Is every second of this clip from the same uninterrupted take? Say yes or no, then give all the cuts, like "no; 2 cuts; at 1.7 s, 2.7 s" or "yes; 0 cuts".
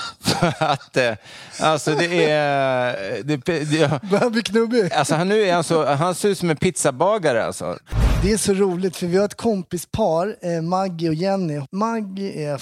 no; 2 cuts; at 7.8 s, 11.6 s